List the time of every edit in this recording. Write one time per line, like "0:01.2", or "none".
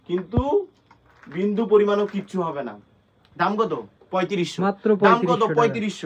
none